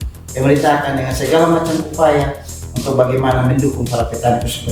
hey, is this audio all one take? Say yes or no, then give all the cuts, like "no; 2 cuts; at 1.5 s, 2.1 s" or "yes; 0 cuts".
yes; 0 cuts